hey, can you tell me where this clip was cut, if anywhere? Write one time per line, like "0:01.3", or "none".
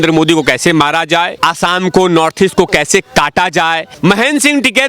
0:01.4
0:03.9